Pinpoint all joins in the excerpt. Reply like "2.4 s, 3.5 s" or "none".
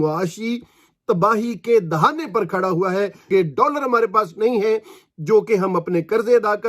3.3 s